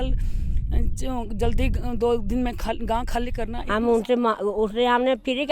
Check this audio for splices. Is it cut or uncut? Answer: cut